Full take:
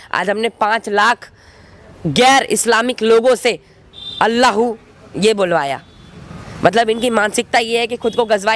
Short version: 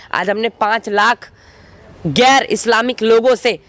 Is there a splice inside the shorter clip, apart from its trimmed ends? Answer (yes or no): no